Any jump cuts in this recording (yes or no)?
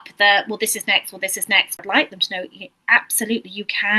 yes